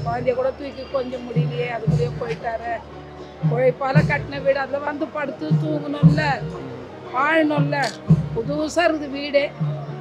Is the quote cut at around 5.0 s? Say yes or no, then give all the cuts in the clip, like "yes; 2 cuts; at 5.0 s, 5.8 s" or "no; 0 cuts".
no; 0 cuts